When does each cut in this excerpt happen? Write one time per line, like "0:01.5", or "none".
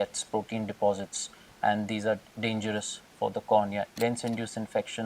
0:02.3
0:03.9